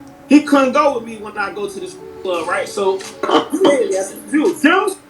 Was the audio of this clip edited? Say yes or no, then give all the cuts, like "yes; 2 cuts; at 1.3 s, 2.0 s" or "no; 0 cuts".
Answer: yes; 1 cut; at 3.2 s